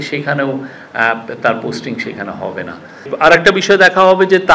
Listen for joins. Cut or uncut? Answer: cut